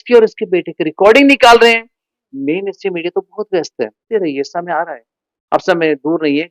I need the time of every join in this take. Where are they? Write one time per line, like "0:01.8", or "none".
0:04.1